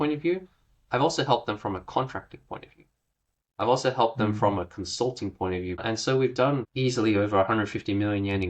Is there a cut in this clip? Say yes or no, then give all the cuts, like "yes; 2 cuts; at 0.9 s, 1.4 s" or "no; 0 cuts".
yes; 2 cuts; at 5.8 s, 6.7 s